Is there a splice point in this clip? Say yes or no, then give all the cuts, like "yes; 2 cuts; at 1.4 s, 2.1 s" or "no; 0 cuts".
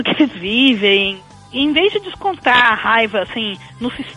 yes; 1 cut; at 1.4 s